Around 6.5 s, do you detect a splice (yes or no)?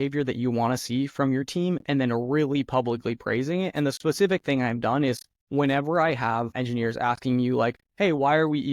yes